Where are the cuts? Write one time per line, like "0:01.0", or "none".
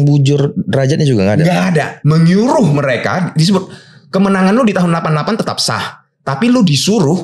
0:01.9